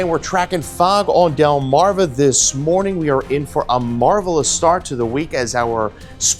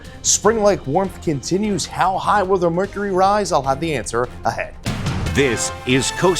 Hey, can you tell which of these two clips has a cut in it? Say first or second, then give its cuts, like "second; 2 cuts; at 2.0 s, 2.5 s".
second; 1 cut; at 4.9 s